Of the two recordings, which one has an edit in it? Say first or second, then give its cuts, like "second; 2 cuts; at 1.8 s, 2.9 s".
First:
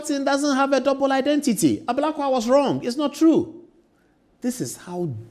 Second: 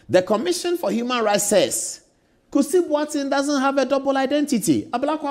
first; 1 cut; at 3.6 s